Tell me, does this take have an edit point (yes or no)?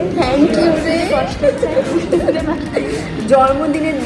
no